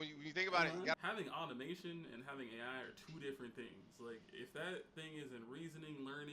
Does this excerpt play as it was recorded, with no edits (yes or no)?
no